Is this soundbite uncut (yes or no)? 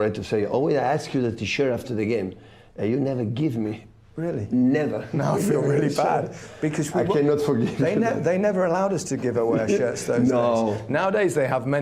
no